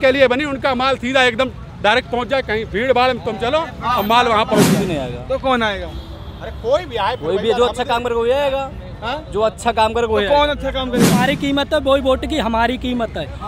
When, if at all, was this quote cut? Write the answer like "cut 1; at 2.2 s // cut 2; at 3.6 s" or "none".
cut 1; at 4.7 s // cut 2; at 11.2 s